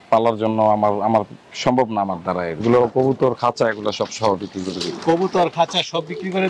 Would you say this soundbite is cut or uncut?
cut